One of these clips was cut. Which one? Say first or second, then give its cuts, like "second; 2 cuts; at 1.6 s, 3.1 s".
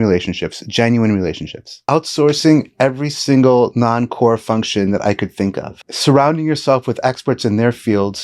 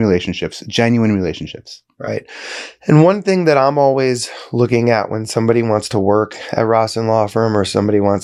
first; 2 cuts; at 1.9 s, 5.9 s